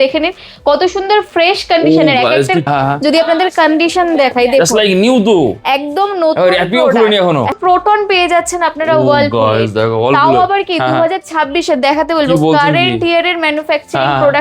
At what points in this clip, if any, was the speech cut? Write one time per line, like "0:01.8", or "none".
0:02.7
0:07.6